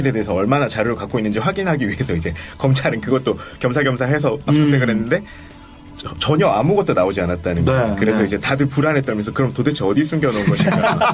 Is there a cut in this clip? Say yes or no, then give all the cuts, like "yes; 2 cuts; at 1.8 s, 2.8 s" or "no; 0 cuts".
no; 0 cuts